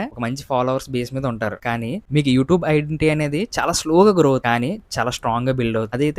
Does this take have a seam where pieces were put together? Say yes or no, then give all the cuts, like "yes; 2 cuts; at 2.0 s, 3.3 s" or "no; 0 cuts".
yes; 1 cut; at 2.0 s